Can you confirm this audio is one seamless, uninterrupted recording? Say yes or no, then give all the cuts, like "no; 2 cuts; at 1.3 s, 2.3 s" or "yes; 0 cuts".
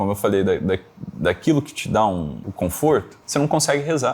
no; 2 cuts; at 2.4 s, 3.2 s